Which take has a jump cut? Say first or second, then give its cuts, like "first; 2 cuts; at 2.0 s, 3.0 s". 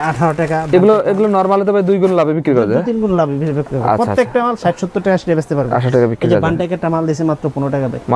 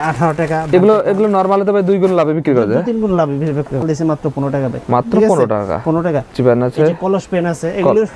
second; 2 cuts; at 3.8 s, 6.3 s